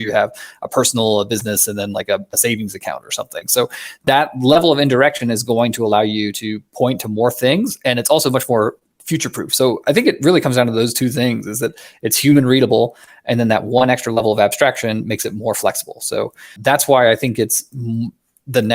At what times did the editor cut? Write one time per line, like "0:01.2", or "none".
0:08.8
0:16.5